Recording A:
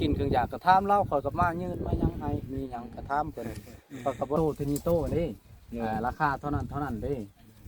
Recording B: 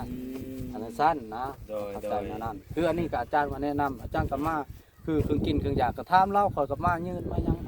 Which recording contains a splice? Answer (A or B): A